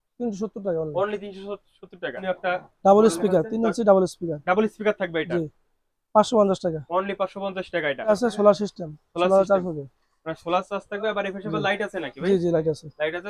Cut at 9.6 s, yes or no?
no